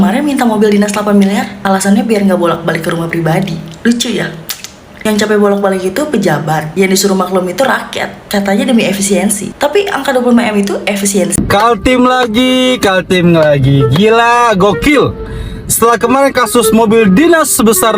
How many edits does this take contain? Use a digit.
1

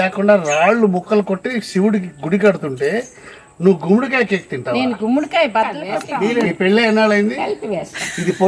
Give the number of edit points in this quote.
1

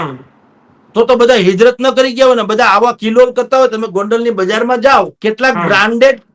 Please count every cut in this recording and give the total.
1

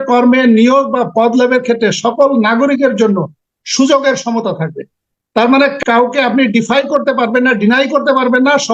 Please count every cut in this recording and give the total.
1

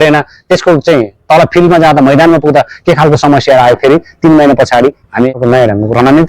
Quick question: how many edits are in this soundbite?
1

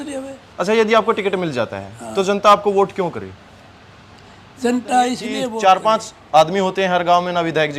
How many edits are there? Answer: 1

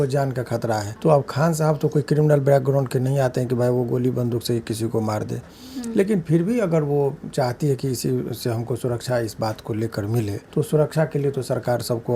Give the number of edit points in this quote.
2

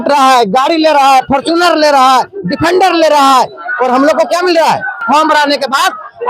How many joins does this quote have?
1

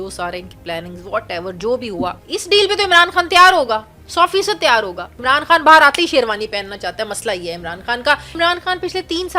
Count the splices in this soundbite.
3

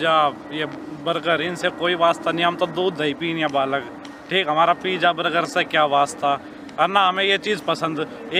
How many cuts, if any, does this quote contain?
0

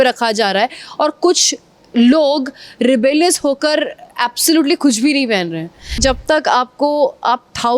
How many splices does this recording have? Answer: 1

